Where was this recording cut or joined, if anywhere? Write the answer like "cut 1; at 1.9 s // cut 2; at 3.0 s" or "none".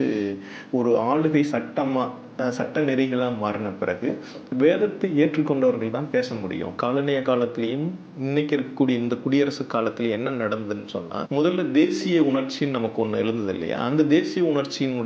cut 1; at 6.7 s // cut 2; at 11.2 s